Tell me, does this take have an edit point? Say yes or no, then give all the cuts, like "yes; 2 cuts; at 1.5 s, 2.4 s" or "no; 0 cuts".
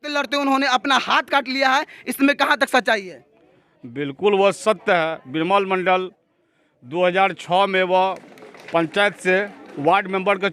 no; 0 cuts